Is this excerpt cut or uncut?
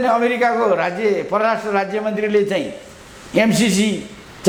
uncut